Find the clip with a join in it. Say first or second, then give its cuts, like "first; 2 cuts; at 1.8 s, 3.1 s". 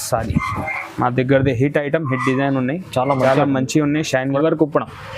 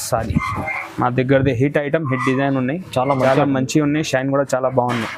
first; 1 cut; at 4.3 s